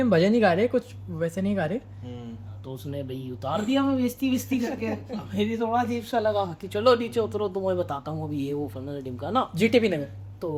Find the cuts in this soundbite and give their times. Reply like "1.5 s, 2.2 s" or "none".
none